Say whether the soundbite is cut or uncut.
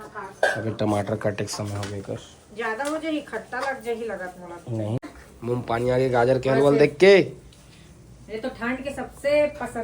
cut